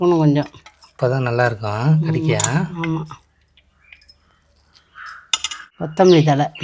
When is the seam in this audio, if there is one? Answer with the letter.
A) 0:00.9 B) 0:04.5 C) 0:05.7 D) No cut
C